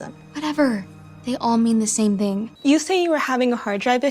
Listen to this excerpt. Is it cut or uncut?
cut